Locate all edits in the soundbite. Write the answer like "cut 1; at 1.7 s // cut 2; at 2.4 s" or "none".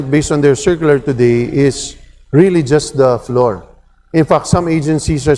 none